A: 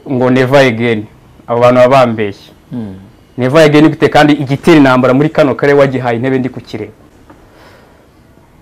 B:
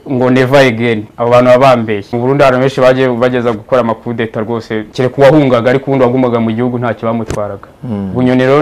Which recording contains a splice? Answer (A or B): B